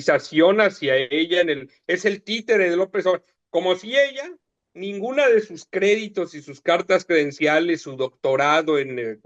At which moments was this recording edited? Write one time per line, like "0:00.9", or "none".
none

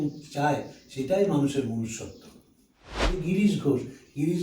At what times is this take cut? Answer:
0:03.0

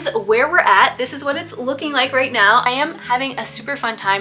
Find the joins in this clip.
0:02.7

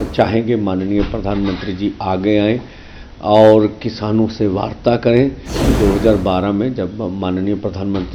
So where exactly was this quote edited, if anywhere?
0:05.7

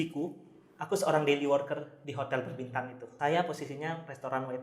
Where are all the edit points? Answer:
0:03.0

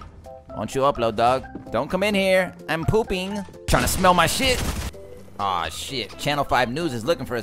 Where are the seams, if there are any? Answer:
0:01.6
0:03.5
0:04.9

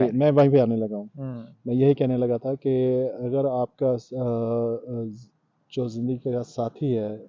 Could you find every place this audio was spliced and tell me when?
none

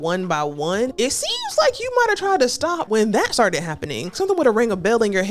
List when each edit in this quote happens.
0:00.9
0:02.8
0:04.2

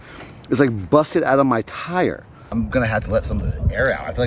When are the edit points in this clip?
none

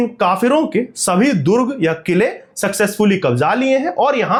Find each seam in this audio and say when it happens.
none

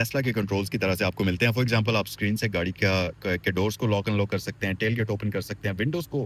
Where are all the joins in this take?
none

